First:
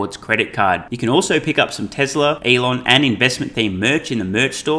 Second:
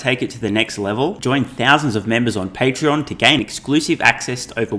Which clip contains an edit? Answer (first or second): first